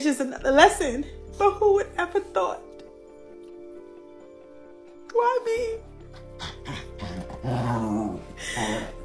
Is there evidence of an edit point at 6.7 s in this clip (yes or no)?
no